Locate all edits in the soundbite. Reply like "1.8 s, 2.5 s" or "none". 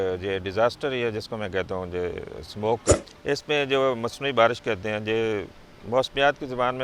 3.1 s